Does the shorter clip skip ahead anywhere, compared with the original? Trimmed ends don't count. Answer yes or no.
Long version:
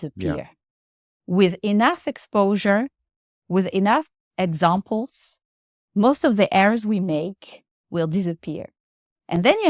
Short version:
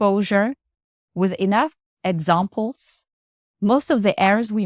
no